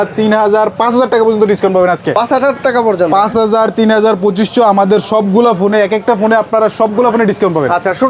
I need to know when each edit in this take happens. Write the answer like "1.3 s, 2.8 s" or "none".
none